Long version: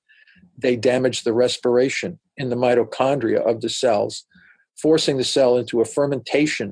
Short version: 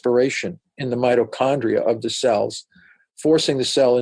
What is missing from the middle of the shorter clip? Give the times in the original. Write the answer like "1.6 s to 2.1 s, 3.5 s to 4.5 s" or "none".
none